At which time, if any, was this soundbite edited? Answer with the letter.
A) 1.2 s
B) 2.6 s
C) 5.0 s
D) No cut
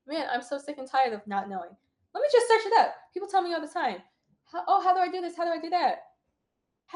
D